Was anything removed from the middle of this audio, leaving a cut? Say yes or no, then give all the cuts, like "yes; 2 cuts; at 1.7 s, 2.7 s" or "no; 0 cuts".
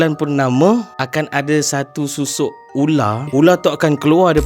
yes; 2 cuts; at 1.0 s, 3.2 s